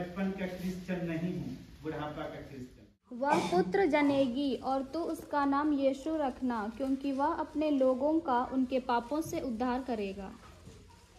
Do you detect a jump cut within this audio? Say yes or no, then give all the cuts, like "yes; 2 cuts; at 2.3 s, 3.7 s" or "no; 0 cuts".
yes; 1 cut; at 3.2 s